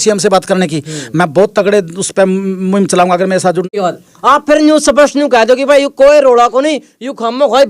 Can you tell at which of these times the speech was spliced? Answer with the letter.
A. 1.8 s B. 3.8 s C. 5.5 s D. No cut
B